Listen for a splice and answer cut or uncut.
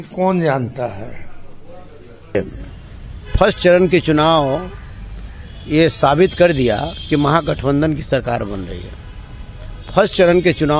cut